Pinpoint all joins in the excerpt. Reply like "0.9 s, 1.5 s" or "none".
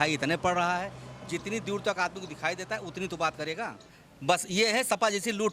4.1 s